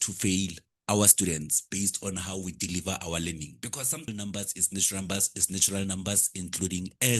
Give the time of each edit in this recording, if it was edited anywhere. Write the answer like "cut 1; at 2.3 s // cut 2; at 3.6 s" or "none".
cut 1; at 4.1 s